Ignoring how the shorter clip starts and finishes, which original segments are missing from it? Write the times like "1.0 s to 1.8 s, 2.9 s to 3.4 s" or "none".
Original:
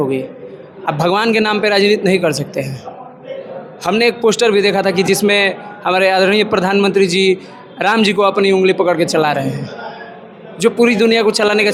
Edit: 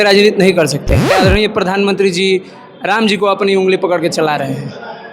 2.8 s to 6.1 s